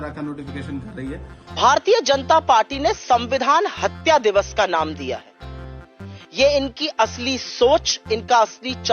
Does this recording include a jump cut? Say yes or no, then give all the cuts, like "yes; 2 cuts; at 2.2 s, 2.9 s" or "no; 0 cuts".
yes; 1 cut; at 1.5 s